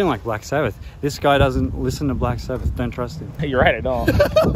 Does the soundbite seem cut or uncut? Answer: cut